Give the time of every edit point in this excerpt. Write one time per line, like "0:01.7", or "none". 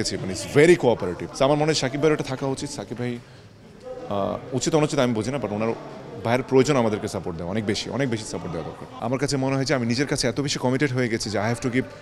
0:01.2
0:09.0